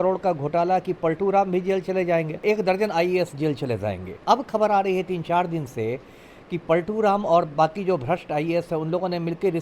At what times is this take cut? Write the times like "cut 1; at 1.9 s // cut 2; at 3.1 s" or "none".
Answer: cut 1; at 2.4 s // cut 2; at 4.1 s